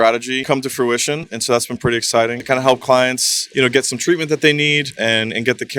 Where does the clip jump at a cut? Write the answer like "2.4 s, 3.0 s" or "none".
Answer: 2.4 s